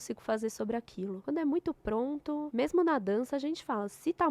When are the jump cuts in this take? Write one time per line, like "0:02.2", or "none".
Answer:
0:01.2
0:02.5